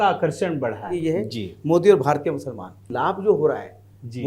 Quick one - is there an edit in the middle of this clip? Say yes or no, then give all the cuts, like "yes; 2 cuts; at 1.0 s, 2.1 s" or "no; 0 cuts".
yes; 2 cuts; at 0.9 s, 2.8 s